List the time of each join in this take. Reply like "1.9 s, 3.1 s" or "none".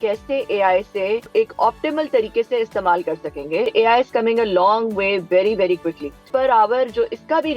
1.3 s, 3.7 s, 6.3 s